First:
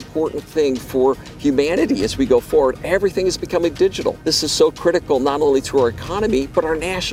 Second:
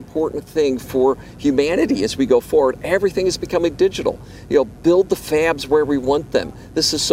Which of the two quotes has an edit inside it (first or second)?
first